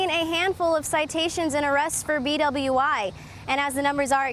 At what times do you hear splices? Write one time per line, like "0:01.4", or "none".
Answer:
none